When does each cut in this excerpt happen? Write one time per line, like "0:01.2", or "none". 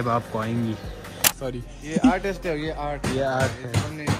0:01.3